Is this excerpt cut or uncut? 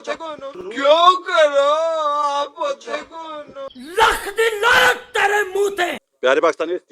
uncut